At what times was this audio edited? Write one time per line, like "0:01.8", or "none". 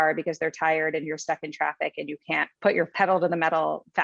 0:02.8